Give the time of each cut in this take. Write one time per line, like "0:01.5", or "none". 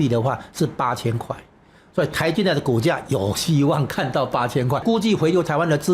0:04.8